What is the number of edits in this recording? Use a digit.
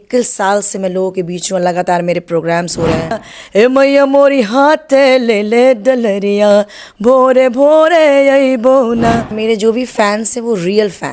2